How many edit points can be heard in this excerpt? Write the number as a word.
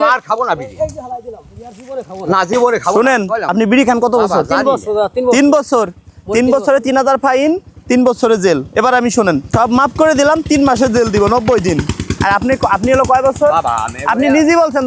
two